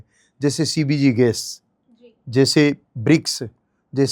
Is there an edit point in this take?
no; 0 cuts

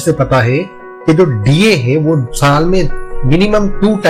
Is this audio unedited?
yes; 0 cuts

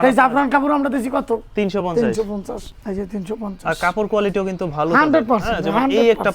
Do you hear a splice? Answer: yes; 1 cut; at 2.7 s

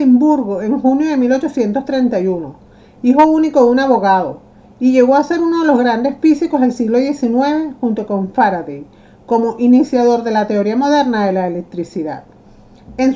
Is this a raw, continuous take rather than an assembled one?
no; 1 cut; at 10.6 s

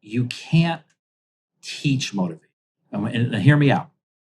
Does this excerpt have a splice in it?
no; 0 cuts

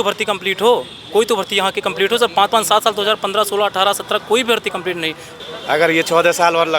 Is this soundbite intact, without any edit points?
no; 1 cut; at 5.3 s

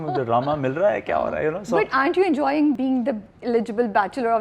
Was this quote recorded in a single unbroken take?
no; 1 cut; at 2.8 s

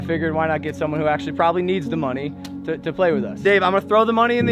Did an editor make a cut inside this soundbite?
yes; 1 cut; at 3.4 s

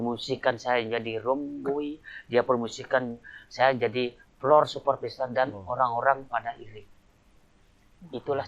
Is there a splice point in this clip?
no; 0 cuts

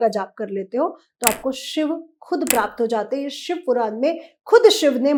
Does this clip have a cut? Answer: no; 0 cuts

